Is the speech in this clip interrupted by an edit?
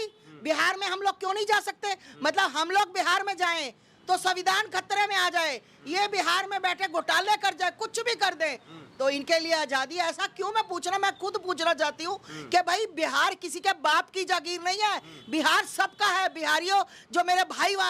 no; 0 cuts

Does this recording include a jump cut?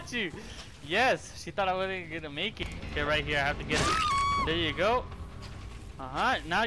yes; 1 cut; at 2.6 s

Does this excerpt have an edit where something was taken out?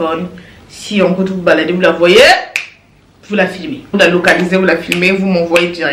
yes; 1 cut; at 3.9 s

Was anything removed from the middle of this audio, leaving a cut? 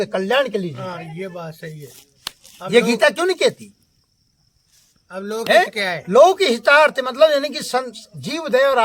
no; 0 cuts

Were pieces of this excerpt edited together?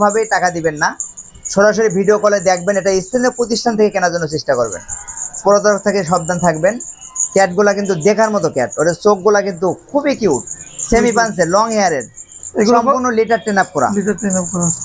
no; 0 cuts

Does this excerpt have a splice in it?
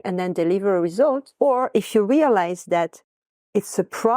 yes; 1 cut; at 1.3 s

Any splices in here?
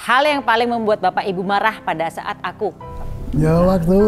yes; 1 cut; at 2.9 s

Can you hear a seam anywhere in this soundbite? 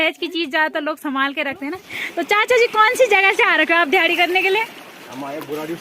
yes; 1 cut; at 2.0 s

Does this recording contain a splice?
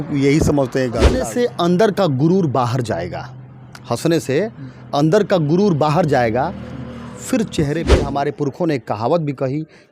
yes; 2 cuts; at 1.2 s, 8.0 s

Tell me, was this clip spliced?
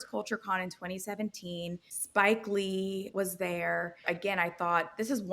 yes; 3 cuts; at 1.9 s, 3.1 s, 4.0 s

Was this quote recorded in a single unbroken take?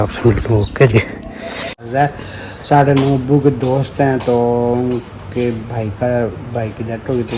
no; 1 cut; at 1.9 s

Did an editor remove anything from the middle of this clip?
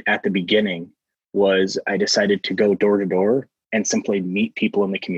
no; 0 cuts

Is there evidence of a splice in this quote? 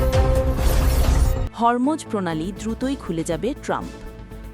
no; 0 cuts

